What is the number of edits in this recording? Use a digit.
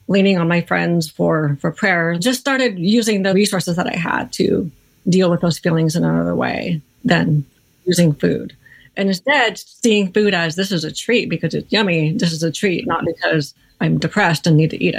2